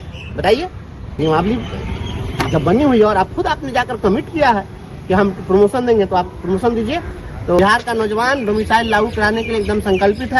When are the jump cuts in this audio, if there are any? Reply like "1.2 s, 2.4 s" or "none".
1.0 s, 7.6 s

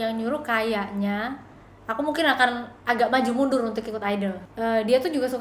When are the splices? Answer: 4.4 s

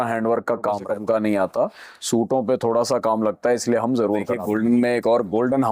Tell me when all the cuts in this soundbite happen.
0.9 s, 4.3 s

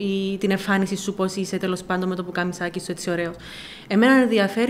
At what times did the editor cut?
none

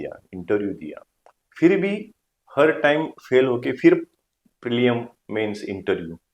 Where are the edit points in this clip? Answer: none

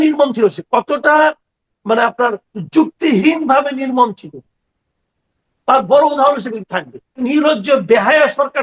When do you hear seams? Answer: 7.1 s

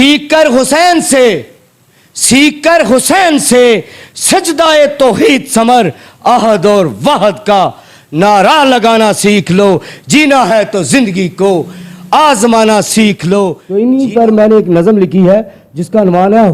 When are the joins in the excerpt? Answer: 13.6 s

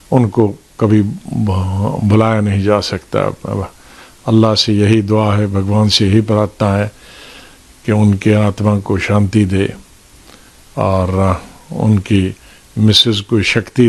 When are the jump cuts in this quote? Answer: none

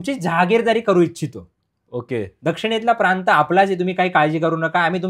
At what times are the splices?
none

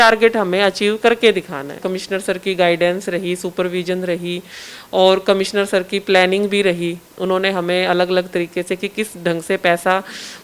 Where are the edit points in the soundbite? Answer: 1.9 s

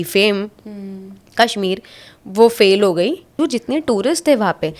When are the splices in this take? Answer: 3.3 s

